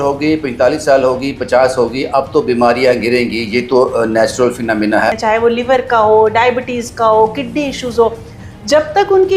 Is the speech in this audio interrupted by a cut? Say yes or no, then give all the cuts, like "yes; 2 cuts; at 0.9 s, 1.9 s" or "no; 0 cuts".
yes; 1 cut; at 5.2 s